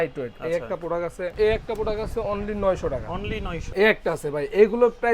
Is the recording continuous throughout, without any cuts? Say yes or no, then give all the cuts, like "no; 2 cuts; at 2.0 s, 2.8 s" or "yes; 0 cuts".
no; 2 cuts; at 1.3 s, 3.6 s